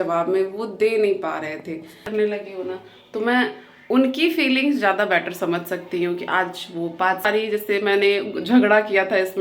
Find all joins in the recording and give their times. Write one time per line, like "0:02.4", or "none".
0:02.0
0:07.2